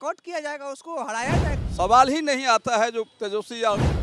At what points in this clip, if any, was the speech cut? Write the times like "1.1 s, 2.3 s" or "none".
1.6 s